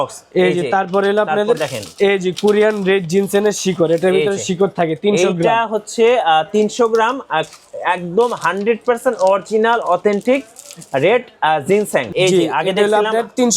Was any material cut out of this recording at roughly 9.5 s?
no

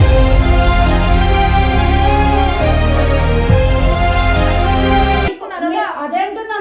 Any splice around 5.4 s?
yes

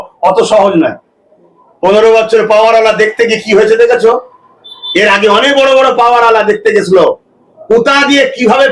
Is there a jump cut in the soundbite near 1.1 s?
no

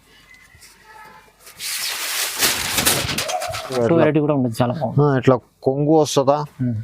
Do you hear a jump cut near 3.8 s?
yes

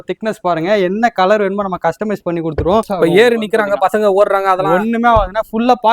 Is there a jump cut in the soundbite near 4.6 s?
no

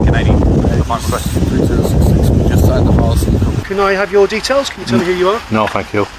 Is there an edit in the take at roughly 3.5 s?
yes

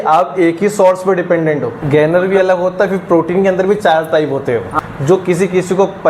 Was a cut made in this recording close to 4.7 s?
yes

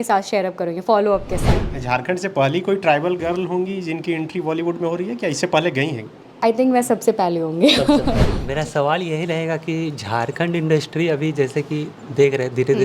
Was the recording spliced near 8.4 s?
yes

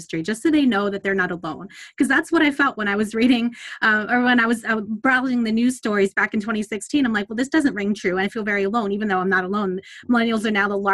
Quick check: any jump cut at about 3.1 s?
no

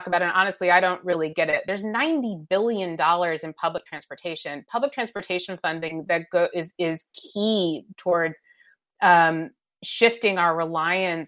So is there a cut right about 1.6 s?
yes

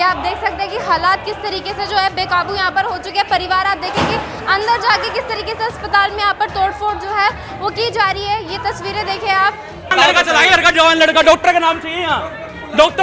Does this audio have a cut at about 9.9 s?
yes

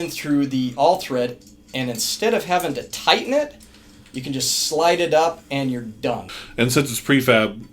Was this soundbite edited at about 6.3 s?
yes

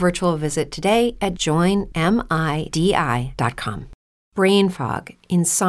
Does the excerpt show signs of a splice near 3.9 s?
yes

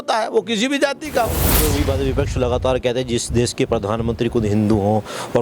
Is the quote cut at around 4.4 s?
no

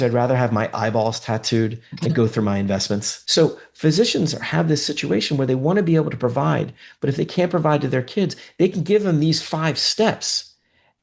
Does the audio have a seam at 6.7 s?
no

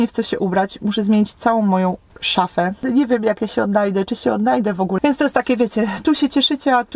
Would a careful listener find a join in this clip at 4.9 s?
yes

